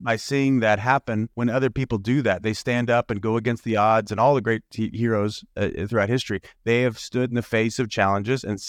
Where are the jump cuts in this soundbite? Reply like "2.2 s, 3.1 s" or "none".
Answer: 1.3 s

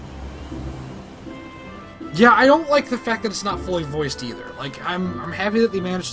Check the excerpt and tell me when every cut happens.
none

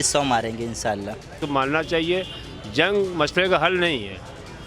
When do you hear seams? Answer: 1.4 s

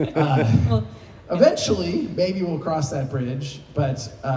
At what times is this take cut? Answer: none

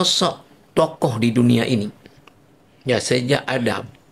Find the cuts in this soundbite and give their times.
none

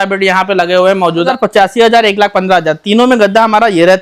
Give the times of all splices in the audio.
1.3 s

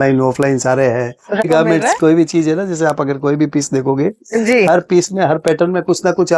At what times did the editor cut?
1.4 s

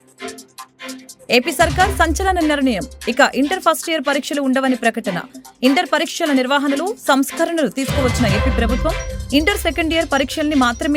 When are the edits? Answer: none

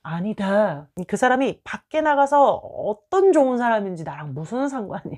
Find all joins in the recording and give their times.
0.9 s

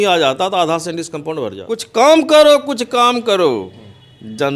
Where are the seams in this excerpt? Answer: 1.7 s

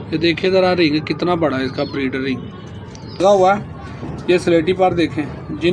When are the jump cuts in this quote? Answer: 3.2 s

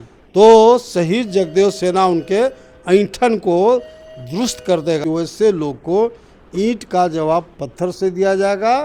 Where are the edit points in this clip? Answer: 5.0 s

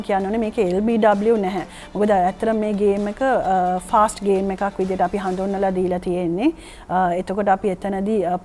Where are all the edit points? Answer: none

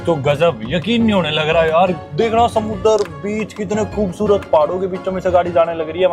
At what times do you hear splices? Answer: 2.0 s

